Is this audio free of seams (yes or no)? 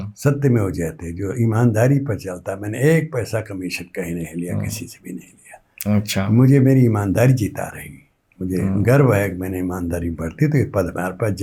yes